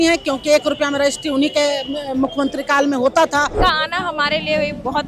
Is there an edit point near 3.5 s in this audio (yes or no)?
yes